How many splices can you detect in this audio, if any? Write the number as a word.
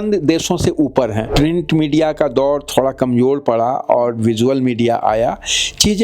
one